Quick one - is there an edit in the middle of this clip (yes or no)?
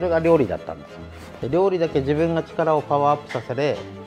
no